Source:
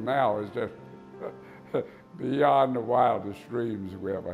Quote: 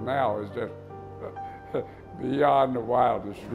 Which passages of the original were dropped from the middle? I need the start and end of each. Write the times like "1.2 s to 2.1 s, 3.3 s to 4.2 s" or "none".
none